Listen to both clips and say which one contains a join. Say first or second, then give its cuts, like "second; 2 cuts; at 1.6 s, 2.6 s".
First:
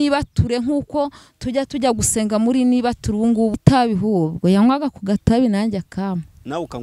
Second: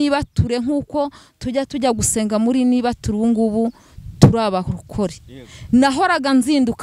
first; 1 cut; at 3.6 s